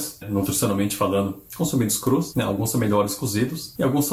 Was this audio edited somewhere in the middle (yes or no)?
no